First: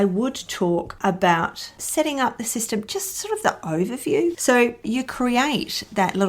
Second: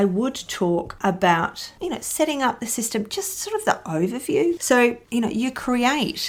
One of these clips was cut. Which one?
first; 2 cuts; at 1.8 s, 4.9 s

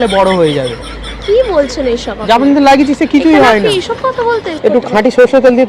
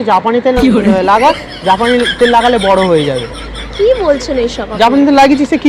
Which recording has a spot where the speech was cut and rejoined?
first; 1 cut; at 4.5 s

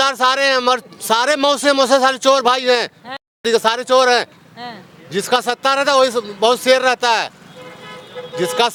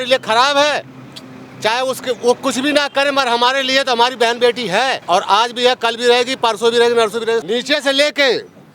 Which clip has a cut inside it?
second; 2 cuts; at 5.0 s, 7.4 s

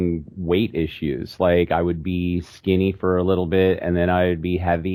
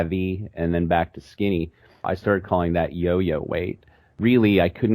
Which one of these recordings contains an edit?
second; 2 cuts; at 2.1 s, 4.1 s

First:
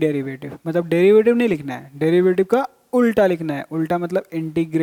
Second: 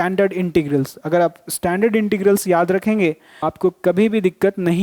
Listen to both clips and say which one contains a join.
second; 1 cut; at 3.5 s

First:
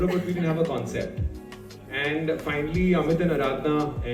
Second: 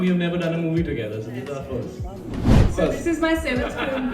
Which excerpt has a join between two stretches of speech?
second; 1 cut; at 2.6 s

